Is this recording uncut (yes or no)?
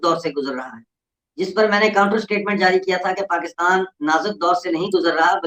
yes